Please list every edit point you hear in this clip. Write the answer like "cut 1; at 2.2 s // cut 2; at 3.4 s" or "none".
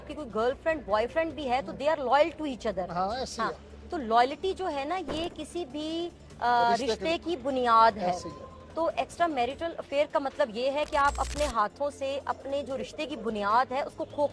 none